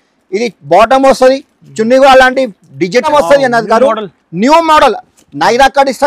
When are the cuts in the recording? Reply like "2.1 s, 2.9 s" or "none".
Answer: 3.1 s